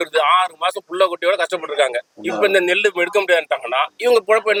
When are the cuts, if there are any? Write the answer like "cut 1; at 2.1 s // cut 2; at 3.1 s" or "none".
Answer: none